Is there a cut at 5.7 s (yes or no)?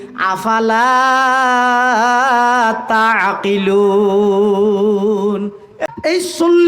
yes